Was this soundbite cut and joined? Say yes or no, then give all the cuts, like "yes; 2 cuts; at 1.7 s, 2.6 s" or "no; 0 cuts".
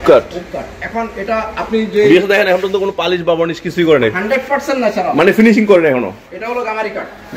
no; 0 cuts